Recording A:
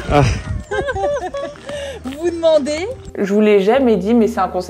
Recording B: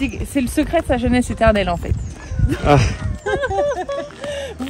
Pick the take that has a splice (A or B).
A